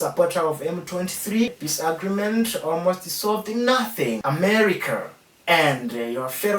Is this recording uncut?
no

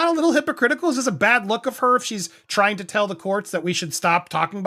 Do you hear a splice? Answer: no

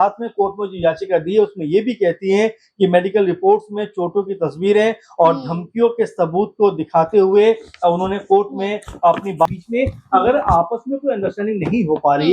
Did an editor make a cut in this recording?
yes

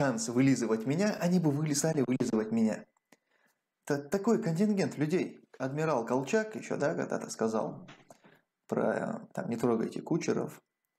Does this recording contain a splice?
yes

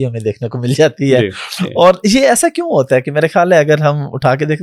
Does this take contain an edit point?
no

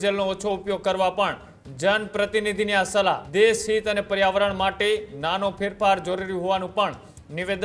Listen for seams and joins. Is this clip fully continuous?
no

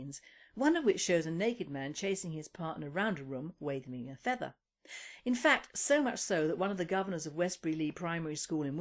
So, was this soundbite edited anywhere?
yes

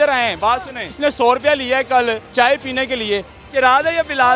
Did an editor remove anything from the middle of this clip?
yes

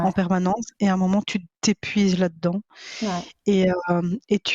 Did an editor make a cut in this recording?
no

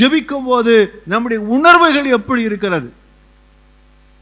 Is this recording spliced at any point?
no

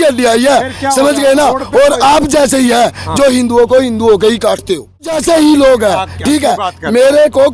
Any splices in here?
yes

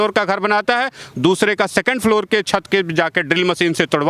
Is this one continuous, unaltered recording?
yes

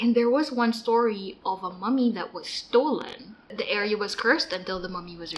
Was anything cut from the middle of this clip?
yes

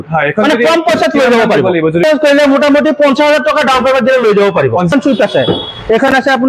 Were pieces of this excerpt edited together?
yes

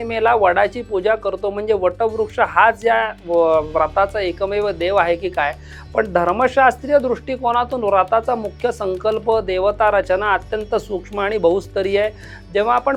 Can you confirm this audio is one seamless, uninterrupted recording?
yes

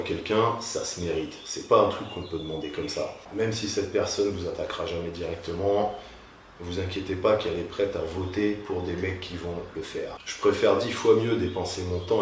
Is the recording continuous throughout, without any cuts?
no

